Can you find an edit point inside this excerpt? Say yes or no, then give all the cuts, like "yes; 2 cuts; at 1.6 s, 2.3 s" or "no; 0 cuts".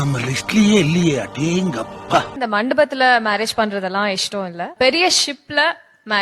yes; 2 cuts; at 2.3 s, 4.7 s